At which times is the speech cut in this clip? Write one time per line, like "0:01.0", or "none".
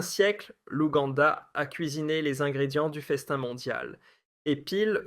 0:01.0